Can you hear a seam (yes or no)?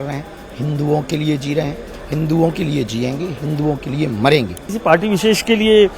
yes